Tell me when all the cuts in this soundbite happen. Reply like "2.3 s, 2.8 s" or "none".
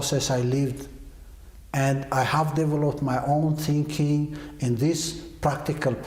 none